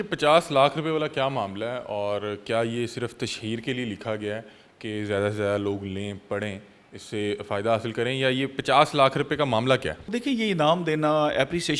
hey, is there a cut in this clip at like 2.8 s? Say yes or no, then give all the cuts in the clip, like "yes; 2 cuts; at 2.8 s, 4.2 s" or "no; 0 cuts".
no; 1 cut; at 10.1 s